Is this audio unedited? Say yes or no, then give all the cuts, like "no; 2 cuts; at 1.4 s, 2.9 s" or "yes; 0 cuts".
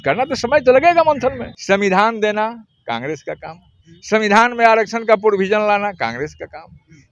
no; 1 cut; at 1.5 s